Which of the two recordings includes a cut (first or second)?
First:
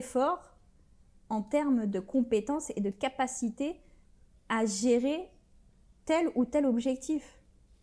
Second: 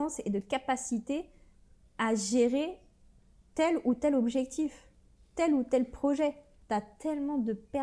second